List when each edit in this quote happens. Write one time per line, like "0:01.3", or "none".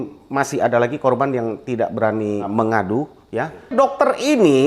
0:02.5
0:03.7